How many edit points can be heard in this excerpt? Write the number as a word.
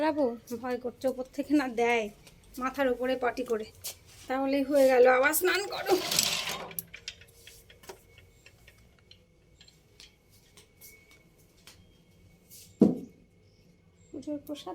zero